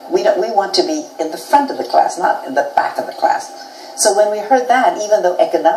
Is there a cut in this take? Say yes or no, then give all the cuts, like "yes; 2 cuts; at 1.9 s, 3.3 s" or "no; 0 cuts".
yes; 1 cut; at 3.8 s